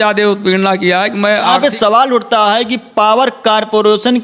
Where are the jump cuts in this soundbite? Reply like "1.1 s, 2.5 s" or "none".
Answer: 1.5 s